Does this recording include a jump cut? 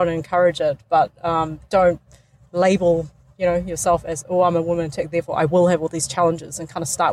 no; 0 cuts

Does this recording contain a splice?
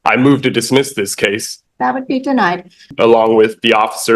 yes; 2 cuts; at 1.5 s, 2.9 s

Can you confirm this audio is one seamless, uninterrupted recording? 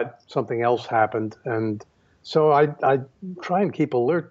yes; 0 cuts

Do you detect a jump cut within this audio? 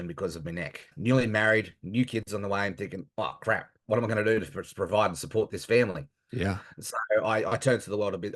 yes; 1 cut; at 0.9 s

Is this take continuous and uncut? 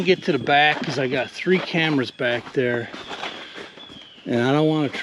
yes; 0 cuts

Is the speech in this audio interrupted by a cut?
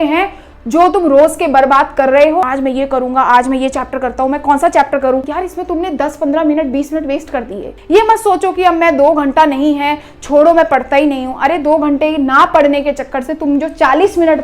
yes; 3 cuts; at 2.4 s, 5.3 s, 7.7 s

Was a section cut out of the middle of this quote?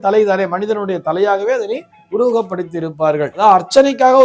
yes; 1 cut; at 3.3 s

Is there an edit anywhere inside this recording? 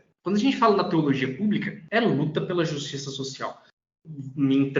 yes; 1 cut; at 3.7 s

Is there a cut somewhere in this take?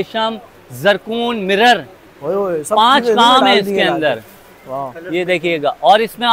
no; 0 cuts

